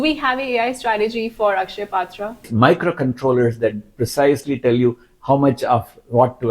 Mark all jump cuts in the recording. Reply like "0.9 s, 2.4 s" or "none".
2.5 s